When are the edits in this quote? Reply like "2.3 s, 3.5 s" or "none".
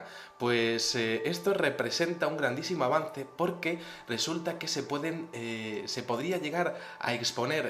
none

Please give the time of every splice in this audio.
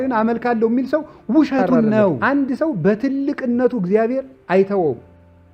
2.2 s

